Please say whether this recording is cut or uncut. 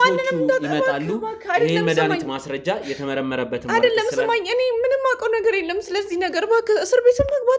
uncut